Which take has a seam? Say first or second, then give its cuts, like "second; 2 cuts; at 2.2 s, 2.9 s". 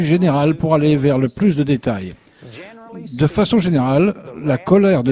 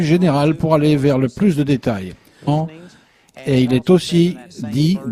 first; 1 cut; at 2.5 s